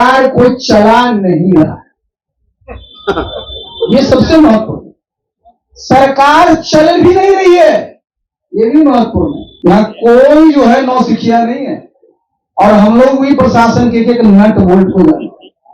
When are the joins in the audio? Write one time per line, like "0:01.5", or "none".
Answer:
0:09.4